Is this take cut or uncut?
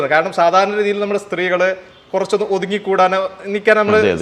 uncut